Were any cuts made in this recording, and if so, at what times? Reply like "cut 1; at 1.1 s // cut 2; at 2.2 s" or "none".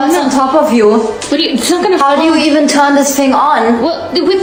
none